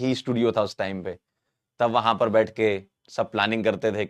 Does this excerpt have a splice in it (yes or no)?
no